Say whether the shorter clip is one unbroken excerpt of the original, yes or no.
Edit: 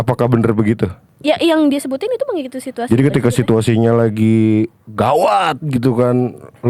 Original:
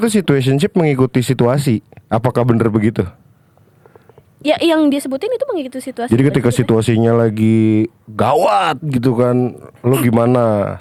no